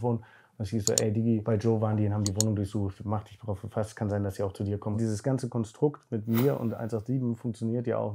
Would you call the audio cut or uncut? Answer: cut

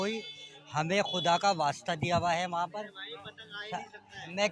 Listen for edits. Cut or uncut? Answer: uncut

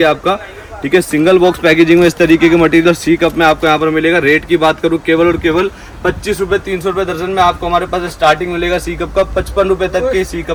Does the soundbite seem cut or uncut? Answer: uncut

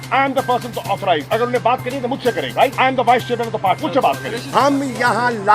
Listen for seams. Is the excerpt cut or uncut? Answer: cut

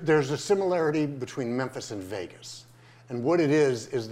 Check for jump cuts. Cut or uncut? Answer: uncut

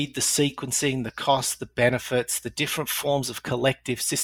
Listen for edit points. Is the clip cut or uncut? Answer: uncut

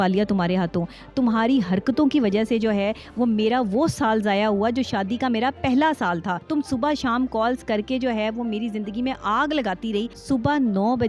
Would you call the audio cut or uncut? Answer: cut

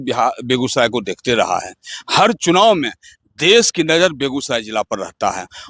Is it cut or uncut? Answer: uncut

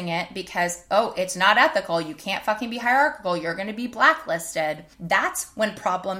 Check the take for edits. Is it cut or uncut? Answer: cut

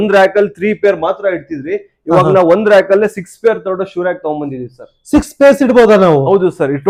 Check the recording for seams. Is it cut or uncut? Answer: uncut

